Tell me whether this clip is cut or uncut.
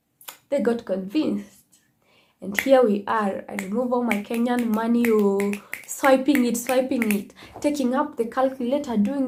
uncut